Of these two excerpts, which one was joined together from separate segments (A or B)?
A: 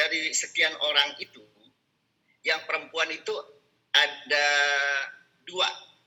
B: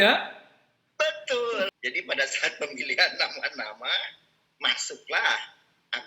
B